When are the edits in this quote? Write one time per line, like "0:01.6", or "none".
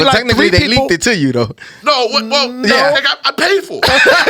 none